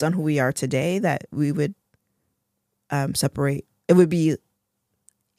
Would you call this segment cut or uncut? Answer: uncut